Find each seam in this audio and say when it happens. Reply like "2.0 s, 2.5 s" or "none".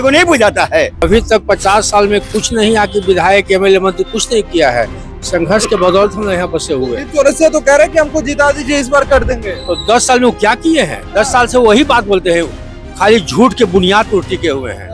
1.0 s